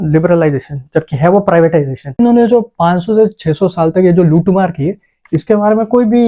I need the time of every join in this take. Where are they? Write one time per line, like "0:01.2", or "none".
0:02.2